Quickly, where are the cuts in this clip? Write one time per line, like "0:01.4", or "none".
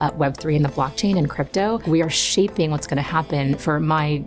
0:01.8